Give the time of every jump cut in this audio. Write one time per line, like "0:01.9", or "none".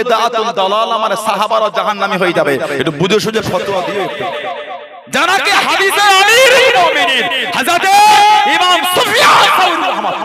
0:04.1